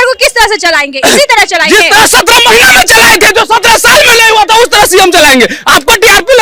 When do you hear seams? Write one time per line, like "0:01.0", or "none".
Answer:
none